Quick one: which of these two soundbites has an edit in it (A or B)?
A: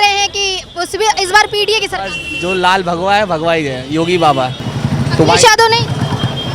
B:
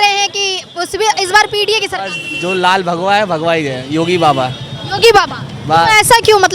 A